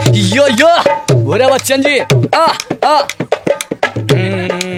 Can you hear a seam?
no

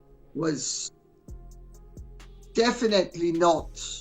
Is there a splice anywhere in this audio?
yes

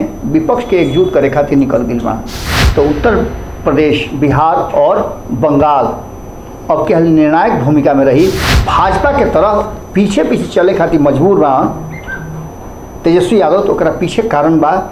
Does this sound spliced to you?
yes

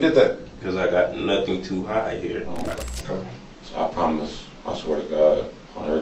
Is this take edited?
yes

